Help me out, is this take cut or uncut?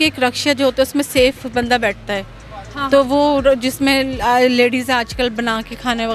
uncut